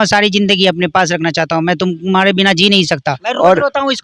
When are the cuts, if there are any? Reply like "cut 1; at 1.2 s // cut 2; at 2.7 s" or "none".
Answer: cut 1; at 3.0 s